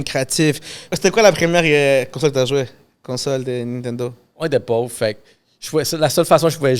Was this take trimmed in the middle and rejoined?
yes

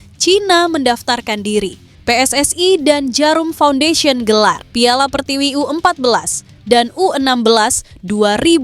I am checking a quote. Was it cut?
yes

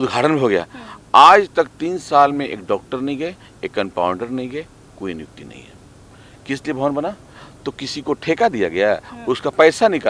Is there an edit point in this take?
no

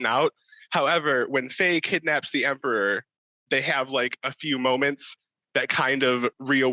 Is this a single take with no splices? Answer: yes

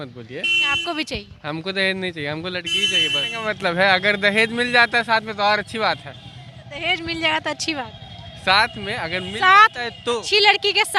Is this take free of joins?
yes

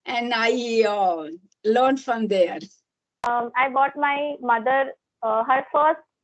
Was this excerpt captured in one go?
no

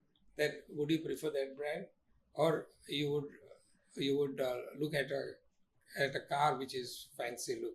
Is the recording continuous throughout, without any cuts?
yes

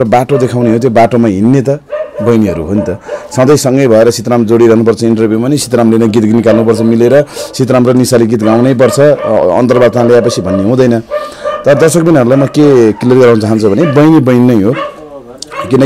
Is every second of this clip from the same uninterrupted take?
yes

